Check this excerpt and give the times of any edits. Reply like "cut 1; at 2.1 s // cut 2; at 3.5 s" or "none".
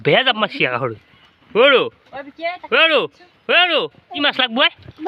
cut 1; at 4.2 s